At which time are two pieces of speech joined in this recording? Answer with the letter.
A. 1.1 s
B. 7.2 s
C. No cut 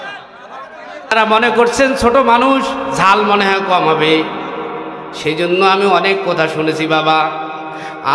A